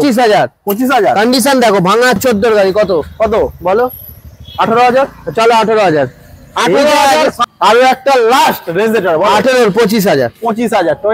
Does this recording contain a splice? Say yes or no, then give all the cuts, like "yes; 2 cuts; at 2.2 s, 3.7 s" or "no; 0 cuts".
yes; 2 cuts; at 2.2 s, 7.4 s